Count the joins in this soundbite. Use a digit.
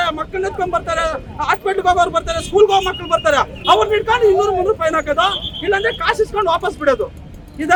0